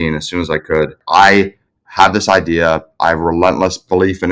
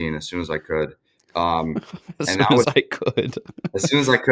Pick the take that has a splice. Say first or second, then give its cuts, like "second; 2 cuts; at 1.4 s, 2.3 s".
first; 1 cut; at 1.0 s